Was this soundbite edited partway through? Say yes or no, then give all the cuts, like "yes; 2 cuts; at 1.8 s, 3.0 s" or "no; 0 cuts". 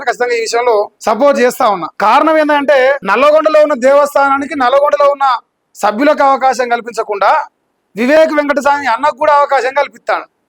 yes; 3 cuts; at 0.9 s, 1.9 s, 3.0 s